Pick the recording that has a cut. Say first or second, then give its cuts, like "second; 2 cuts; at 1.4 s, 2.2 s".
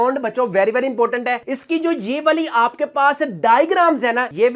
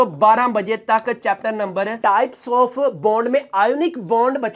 second; 1 cut; at 1.9 s